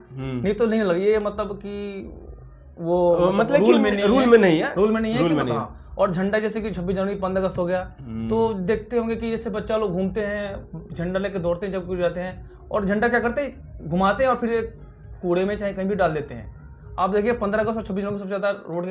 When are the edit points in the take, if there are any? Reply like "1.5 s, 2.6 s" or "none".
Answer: none